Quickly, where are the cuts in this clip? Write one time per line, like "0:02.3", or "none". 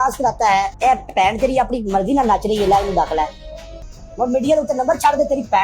0:03.7